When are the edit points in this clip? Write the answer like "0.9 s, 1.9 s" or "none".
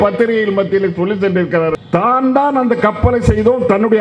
1.8 s